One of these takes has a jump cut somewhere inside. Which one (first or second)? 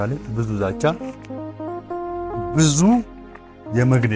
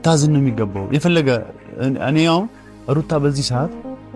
first